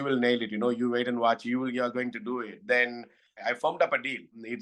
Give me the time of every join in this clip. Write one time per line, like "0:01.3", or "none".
0:03.5